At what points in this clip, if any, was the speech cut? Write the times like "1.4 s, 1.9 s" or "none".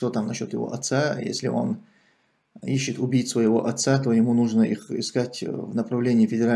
none